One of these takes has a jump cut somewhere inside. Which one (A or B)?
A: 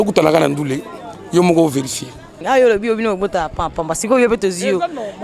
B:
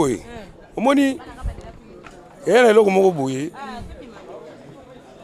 A